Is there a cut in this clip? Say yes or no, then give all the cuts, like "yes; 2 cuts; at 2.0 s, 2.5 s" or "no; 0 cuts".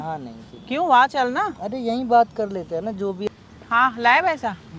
yes; 1 cut; at 3.3 s